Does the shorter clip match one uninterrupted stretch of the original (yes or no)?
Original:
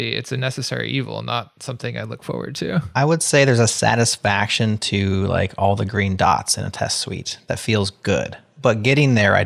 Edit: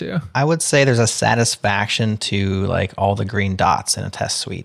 yes